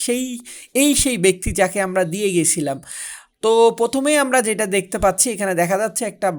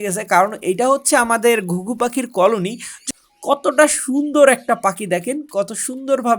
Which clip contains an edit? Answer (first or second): second